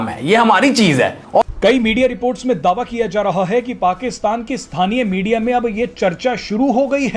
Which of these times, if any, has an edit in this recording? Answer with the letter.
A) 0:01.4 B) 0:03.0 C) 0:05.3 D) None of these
A